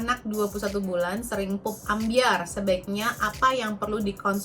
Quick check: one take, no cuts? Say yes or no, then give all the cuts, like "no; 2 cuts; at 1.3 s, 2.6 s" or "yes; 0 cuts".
yes; 0 cuts